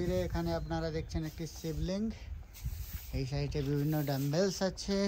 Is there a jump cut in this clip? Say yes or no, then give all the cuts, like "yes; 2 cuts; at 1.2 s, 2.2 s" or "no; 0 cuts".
no; 0 cuts